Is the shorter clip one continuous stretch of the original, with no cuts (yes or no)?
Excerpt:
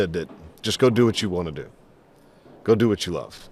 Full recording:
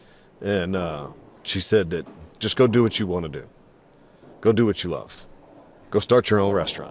yes